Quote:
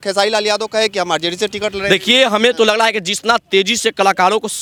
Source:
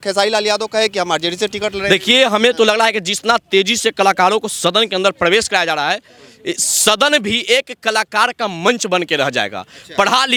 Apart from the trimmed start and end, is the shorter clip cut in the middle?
no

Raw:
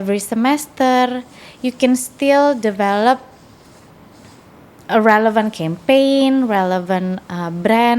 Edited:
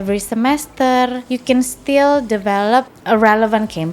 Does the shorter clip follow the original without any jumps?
no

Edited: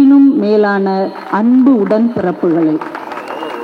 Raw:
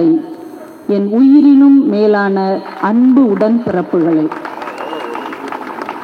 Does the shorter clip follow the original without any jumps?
yes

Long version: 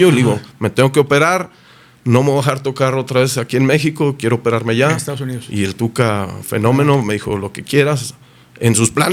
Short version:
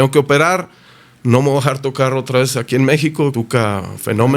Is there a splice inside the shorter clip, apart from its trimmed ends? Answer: yes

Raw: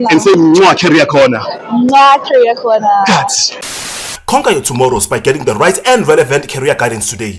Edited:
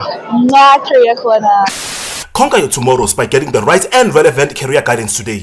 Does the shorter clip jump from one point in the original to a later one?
yes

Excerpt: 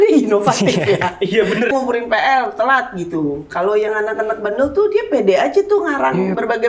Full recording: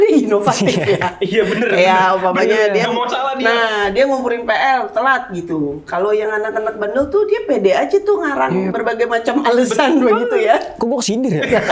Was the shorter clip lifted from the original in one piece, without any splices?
no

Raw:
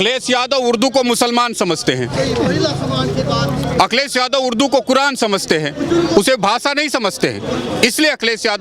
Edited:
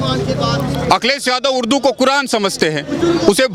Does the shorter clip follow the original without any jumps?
yes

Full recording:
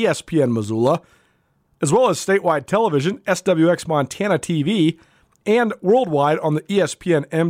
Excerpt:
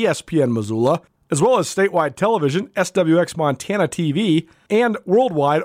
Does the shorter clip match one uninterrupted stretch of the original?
no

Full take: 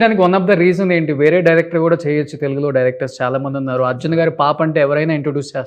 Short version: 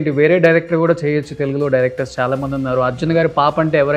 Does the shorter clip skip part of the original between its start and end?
no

